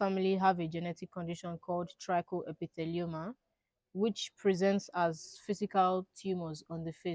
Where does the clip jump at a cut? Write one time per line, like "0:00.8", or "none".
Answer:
none